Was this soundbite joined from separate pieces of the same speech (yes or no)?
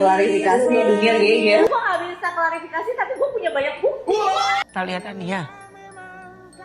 yes